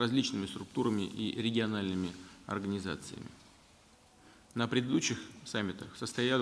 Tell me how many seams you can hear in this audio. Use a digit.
1